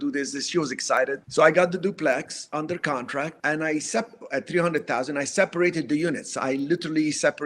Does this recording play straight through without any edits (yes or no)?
no